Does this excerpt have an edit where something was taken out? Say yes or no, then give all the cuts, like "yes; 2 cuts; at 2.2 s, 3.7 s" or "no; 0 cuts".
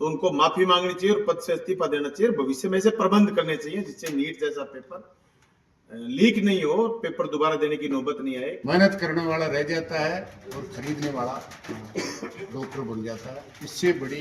yes; 1 cut; at 8.6 s